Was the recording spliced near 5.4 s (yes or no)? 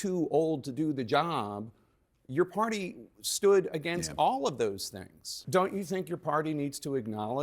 yes